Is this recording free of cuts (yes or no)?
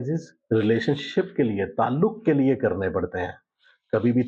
yes